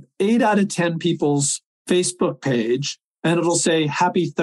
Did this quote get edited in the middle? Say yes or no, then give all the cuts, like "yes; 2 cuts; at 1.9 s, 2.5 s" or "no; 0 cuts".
no; 0 cuts